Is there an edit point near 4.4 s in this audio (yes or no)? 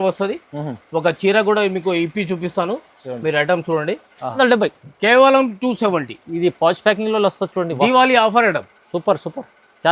yes